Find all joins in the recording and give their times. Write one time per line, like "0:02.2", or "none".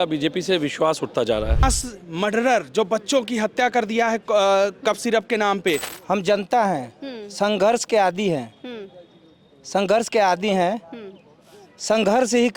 0:01.6
0:05.9